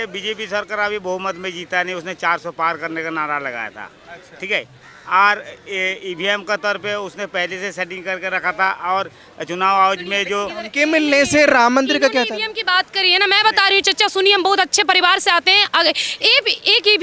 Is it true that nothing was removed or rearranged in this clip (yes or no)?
yes